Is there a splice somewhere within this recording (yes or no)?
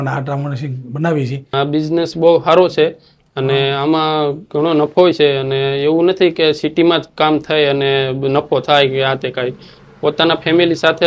yes